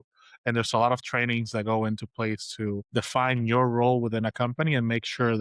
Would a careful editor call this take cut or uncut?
cut